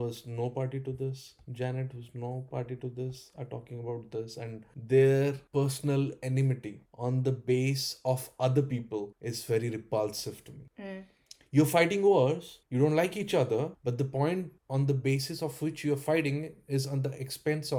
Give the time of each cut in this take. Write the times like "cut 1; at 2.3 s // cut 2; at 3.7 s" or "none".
none